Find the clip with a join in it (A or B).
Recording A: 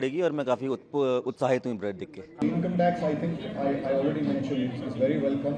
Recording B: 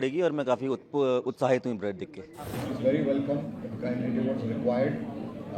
B